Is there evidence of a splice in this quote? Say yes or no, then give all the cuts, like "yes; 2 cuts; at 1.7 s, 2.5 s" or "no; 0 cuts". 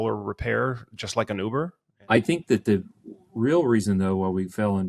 yes; 1 cut; at 1.9 s